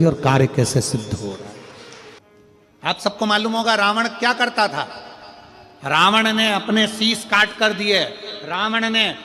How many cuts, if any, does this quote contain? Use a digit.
1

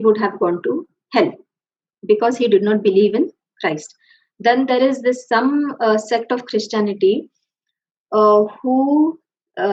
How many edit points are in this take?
0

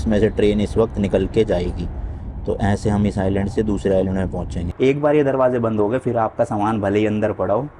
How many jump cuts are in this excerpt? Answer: 1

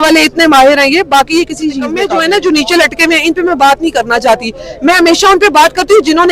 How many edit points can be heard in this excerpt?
1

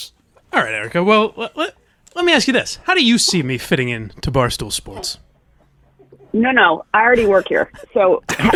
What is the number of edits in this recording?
0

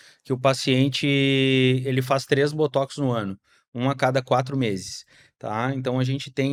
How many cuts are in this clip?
0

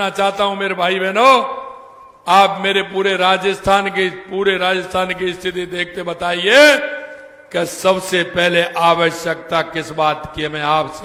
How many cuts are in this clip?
0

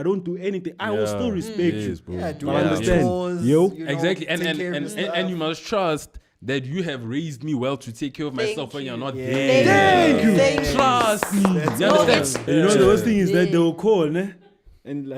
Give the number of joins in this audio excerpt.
1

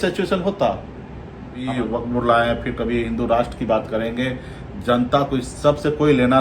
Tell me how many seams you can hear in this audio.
1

